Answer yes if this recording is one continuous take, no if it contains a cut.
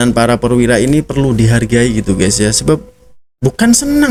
yes